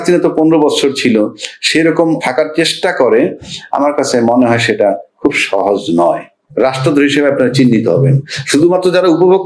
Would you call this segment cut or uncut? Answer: cut